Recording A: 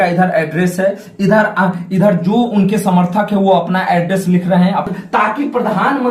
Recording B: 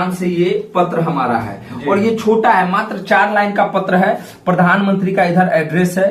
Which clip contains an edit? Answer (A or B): A